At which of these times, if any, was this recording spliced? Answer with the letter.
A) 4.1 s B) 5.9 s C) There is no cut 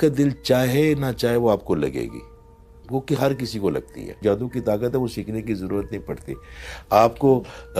A